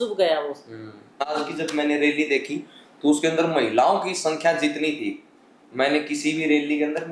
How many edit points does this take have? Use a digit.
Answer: 1